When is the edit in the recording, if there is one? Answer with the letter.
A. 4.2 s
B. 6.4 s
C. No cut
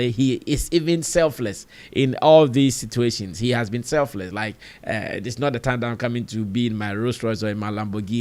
C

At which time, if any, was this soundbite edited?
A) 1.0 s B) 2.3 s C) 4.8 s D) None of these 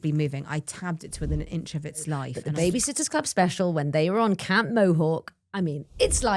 B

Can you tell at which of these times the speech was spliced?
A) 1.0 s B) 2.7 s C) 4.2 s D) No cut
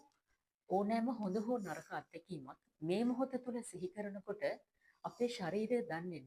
B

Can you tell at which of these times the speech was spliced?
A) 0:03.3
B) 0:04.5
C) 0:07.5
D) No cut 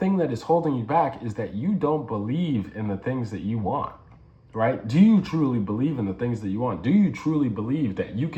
D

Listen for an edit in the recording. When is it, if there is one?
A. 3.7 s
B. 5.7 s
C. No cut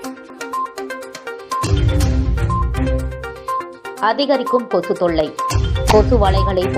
A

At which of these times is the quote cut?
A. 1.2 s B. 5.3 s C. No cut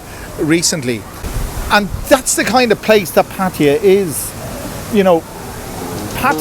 A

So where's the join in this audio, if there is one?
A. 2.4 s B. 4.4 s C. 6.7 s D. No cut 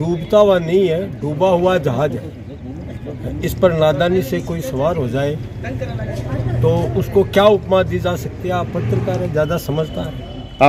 D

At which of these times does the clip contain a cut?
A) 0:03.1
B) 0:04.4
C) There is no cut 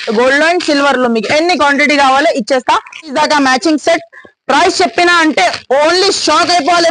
A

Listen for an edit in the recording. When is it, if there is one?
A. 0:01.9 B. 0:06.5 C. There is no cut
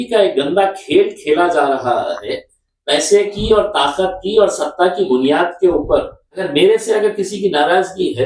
B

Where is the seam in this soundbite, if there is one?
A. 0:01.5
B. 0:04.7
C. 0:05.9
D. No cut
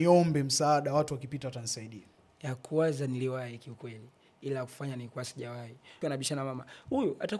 C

